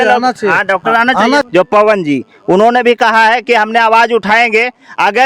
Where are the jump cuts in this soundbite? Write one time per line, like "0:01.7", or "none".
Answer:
0:01.5